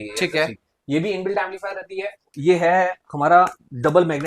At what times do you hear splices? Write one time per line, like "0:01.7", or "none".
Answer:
0:02.3